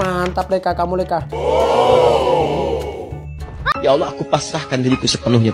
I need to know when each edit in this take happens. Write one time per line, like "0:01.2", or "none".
none